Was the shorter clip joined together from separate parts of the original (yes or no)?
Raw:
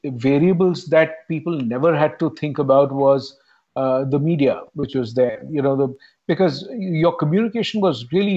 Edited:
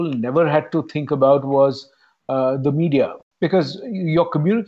yes